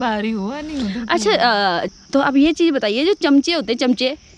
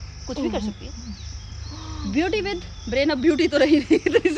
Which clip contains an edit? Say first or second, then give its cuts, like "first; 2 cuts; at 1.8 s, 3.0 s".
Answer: first; 1 cut; at 1.9 s